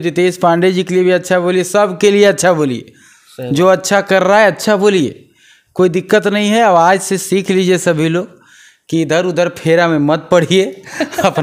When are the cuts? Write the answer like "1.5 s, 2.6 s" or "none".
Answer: none